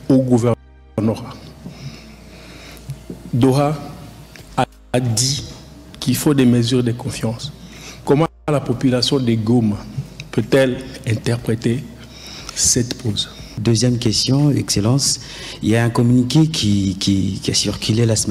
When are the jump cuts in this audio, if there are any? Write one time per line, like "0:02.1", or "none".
0:13.6